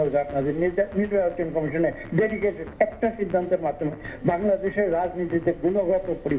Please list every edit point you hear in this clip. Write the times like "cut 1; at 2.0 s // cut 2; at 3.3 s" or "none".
cut 1; at 2.7 s

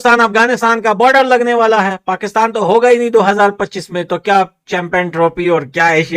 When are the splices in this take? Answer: none

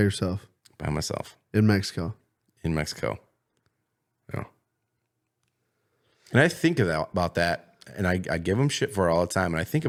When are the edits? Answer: none

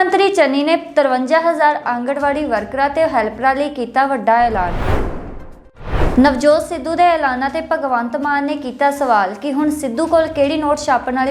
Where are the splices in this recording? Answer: cut 1; at 4.7 s // cut 2; at 6.0 s

